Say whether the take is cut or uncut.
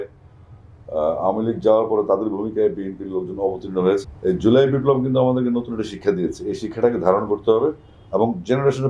cut